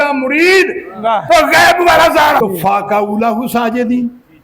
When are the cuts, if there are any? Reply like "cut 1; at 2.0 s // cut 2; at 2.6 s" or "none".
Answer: cut 1; at 2.4 s

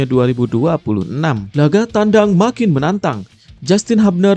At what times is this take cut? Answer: cut 1; at 1.4 s

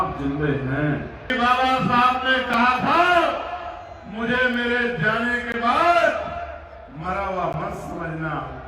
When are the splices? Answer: cut 1; at 1.3 s

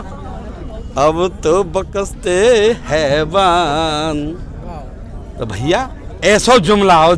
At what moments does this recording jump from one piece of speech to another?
none

